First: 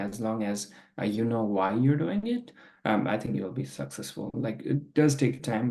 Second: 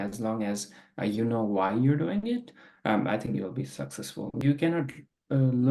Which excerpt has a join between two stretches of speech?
second; 1 cut; at 4.4 s

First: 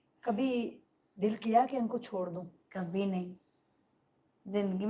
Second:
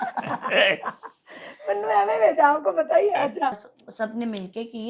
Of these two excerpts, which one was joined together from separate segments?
second; 1 cut; at 3.6 s

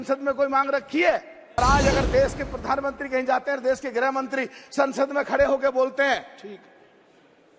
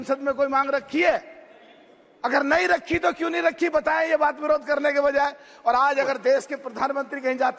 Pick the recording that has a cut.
first; 1 cut; at 1.6 s

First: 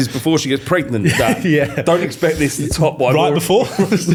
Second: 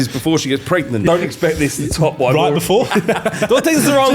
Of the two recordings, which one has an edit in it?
second; 2 cuts; at 1.0 s, 3.0 s

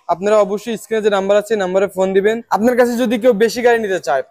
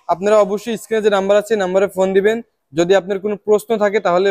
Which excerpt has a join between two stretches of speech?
first; 1 cut; at 2.4 s

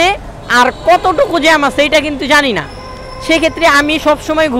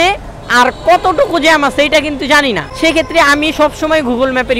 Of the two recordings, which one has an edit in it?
second; 1 cut; at 2.7 s

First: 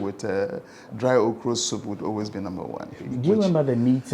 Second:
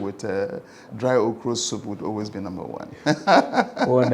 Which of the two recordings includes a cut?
first; 1 cut; at 2.9 s

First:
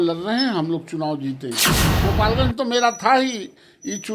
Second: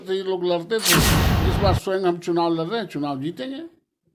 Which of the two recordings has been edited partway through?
first; 1 cut; at 1.9 s

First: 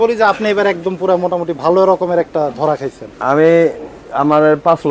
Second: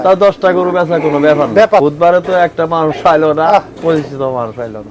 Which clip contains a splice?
second; 1 cut; at 1.8 s

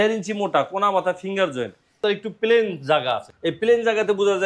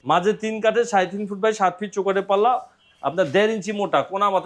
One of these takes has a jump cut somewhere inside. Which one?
first; 2 cuts; at 2.0 s, 3.3 s

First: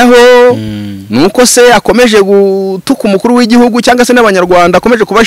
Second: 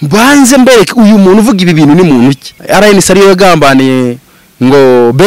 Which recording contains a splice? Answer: second; 1 cut; at 2.5 s

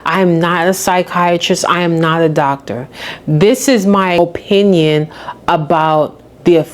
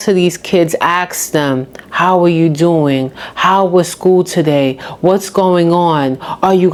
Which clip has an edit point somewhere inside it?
first; 1 cut; at 4.2 s

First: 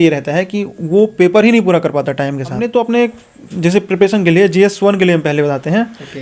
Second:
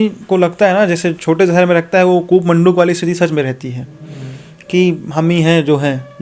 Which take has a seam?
first; 1 cut; at 2.6 s

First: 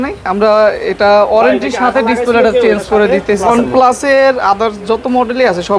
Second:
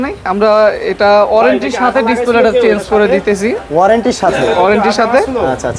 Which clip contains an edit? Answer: first; 1 cut; at 3.3 s

